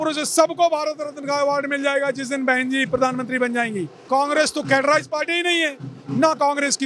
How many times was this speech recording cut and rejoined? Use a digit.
1